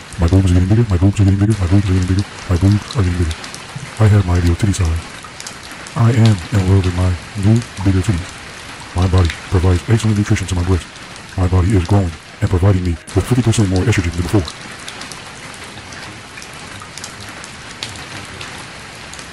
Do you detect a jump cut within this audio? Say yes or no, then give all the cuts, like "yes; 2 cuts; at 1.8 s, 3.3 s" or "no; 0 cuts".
yes; 2 cuts; at 14.4 s, 17.0 s